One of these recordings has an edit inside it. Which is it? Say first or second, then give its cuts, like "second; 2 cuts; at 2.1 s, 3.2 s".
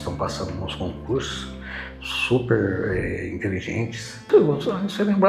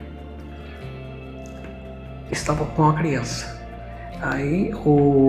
first; 1 cut; at 4.2 s